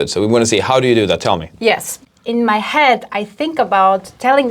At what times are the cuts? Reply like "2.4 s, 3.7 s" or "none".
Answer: 2.0 s